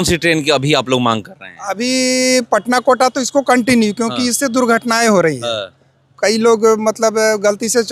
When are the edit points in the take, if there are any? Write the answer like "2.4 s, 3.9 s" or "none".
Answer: none